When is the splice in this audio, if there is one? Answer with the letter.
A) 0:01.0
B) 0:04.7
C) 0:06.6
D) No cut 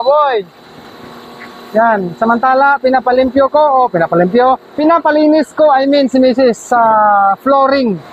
D